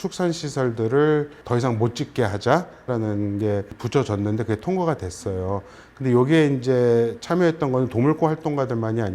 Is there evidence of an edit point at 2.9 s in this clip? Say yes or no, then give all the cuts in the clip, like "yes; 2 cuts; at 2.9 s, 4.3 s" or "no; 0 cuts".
yes; 3 cuts; at 1.4 s, 2.9 s, 3.8 s